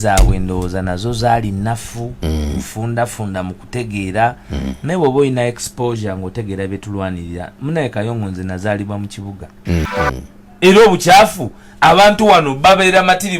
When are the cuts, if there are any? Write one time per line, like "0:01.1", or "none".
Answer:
0:09.9